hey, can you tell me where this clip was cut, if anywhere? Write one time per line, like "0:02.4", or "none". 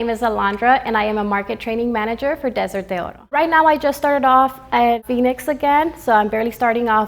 0:03.2
0:05.0